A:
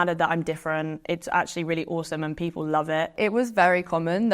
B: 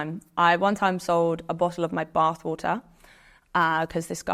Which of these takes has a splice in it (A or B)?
A